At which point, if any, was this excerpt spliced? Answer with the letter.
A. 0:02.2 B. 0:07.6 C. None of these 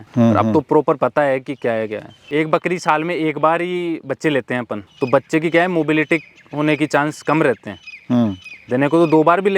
A